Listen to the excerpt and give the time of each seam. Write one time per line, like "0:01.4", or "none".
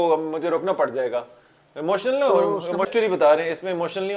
0:02.9